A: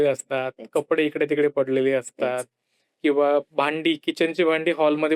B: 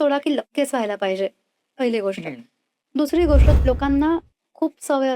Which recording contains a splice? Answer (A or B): B